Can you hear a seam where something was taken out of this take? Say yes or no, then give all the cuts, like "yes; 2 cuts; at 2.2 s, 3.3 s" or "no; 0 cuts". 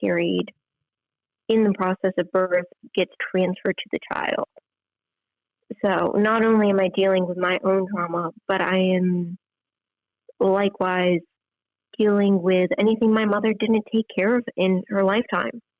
no; 0 cuts